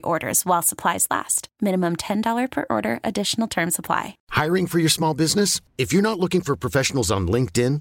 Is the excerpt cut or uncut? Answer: cut